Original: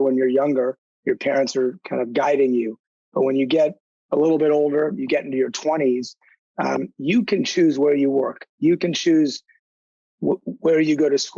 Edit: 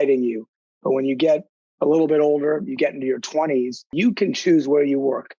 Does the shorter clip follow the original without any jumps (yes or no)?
no